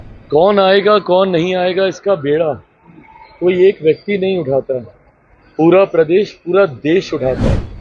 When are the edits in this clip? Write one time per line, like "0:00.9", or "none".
none